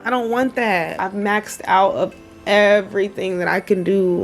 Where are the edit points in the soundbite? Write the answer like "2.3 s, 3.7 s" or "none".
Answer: 1.0 s